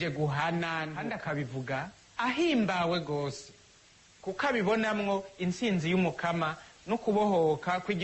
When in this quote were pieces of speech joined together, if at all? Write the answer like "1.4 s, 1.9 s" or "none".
1.0 s